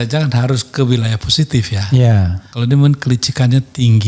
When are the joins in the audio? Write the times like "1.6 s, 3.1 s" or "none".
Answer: 2.4 s